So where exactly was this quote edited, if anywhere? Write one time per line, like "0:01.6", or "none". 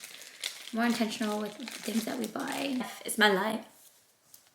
0:02.9